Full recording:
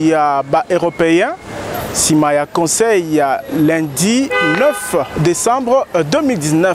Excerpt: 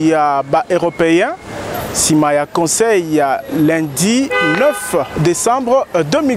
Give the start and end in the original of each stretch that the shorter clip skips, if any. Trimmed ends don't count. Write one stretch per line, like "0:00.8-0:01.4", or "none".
none